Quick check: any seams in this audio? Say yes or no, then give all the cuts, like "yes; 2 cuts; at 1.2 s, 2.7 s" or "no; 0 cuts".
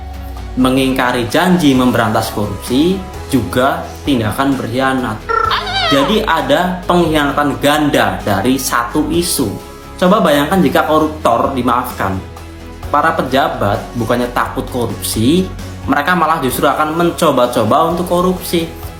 no; 0 cuts